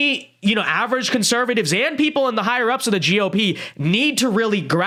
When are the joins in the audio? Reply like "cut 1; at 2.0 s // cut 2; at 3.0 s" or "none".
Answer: none